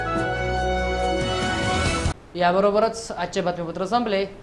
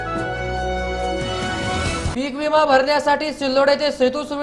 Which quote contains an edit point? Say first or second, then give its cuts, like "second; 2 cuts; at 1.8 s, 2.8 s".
second; 1 cut; at 2.1 s